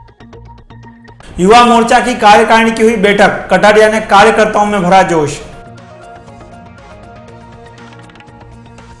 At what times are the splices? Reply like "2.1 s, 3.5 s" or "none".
1.1 s